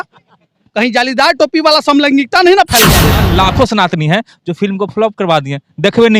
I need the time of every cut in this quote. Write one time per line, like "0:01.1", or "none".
0:03.1

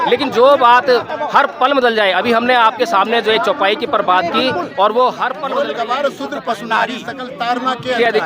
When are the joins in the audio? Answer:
0:05.4

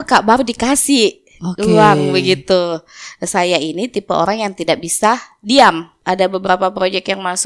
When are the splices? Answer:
0:05.9

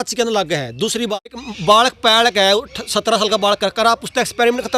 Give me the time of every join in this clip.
0:01.5

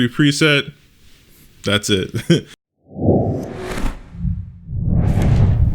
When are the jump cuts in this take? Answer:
0:02.6

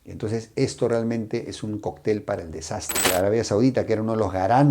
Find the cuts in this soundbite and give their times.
0:03.1

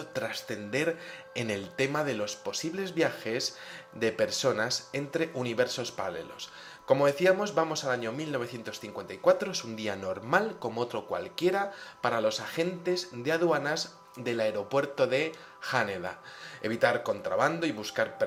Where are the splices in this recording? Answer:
none

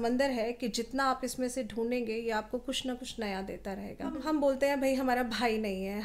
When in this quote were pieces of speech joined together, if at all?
0:04.2

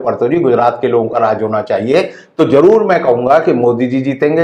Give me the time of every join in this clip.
none

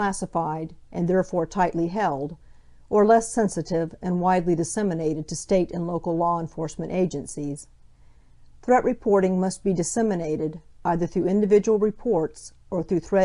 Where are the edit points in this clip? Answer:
0:03.9

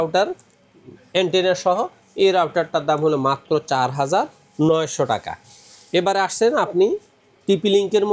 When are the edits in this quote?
none

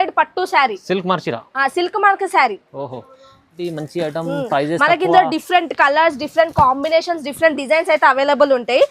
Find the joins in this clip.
0:03.5

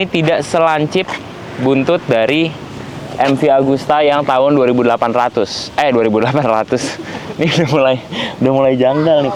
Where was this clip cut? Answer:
none

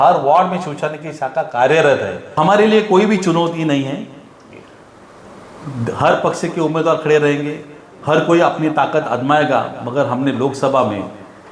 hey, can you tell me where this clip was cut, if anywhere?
0:02.4

